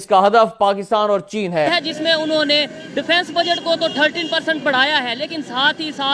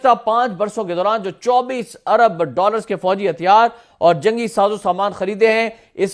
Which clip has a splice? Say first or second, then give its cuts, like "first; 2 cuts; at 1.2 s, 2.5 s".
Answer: first; 1 cut; at 1.7 s